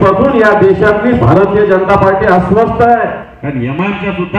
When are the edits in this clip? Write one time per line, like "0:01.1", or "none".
0:03.3